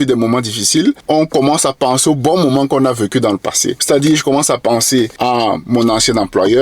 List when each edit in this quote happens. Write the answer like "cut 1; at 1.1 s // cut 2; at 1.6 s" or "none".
cut 1; at 1.0 s // cut 2; at 3.7 s // cut 3; at 5.1 s